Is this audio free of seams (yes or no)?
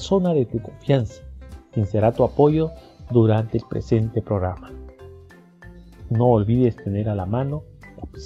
yes